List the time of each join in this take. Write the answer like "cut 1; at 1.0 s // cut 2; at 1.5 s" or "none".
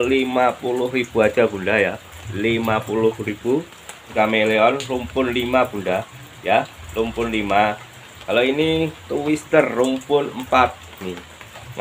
cut 1; at 4.0 s